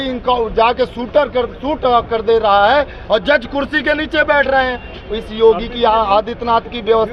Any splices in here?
no; 0 cuts

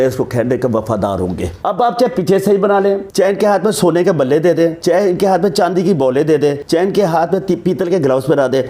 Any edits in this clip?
yes; 4 cuts; at 1.5 s, 3.1 s, 4.8 s, 6.6 s

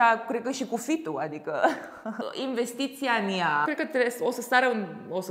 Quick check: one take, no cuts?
no; 2 cuts; at 2.2 s, 3.7 s

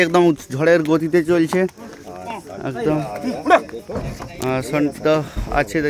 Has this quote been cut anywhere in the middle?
no; 0 cuts

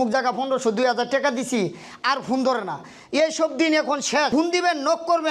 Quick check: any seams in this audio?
yes; 1 cut; at 4.3 s

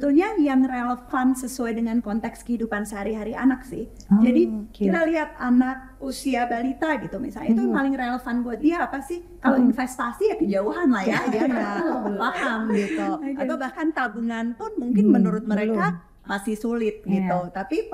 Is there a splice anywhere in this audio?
no; 0 cuts

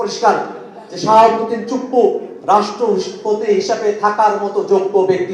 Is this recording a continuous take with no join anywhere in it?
yes; 0 cuts

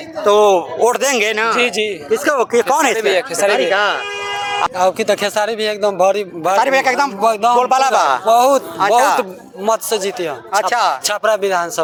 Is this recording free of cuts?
yes; 0 cuts

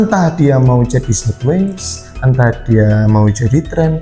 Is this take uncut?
yes; 0 cuts

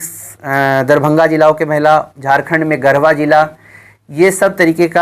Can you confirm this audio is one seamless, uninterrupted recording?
yes; 0 cuts

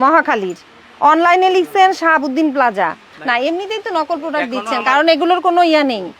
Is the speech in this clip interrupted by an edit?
yes; 1 cut; at 3.1 s

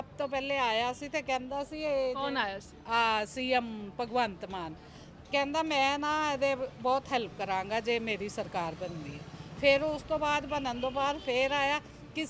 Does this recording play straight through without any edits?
yes; 0 cuts

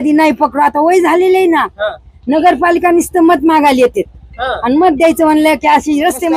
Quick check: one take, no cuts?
yes; 0 cuts

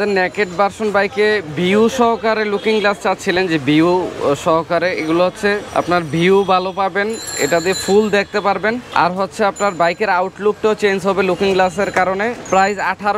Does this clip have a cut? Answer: no; 0 cuts

